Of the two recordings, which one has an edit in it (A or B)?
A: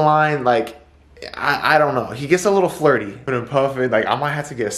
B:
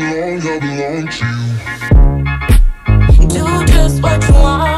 A